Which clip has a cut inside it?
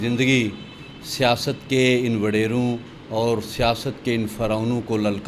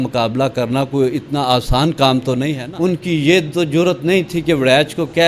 second; 1 cut; at 2.6 s

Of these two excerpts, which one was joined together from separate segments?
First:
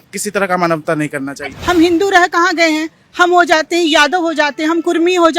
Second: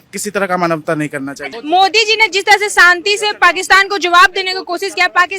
first; 1 cut; at 1.4 s

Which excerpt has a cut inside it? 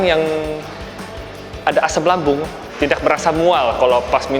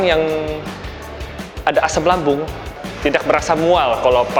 first; 1 cut; at 2.6 s

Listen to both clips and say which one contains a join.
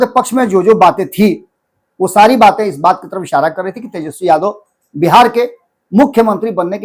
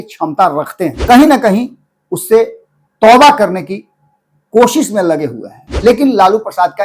second; 2 cuts; at 1.0 s, 5.6 s

